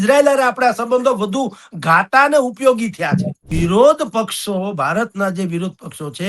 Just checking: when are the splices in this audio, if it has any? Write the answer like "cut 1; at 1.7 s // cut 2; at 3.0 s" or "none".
cut 1; at 3.5 s

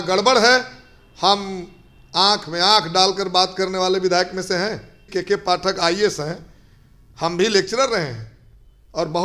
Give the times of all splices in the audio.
cut 1; at 5.1 s

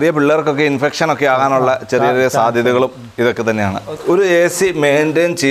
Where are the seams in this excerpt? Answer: cut 1; at 4.0 s

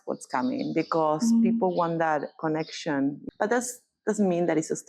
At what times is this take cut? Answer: cut 1; at 3.2 s

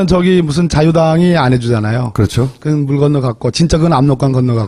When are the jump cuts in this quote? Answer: none

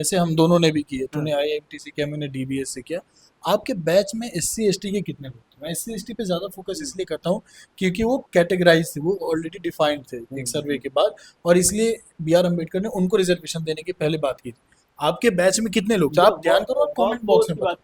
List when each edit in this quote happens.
none

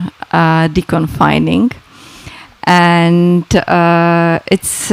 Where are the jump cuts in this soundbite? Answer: none

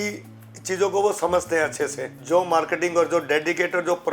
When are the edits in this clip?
cut 1; at 2.1 s

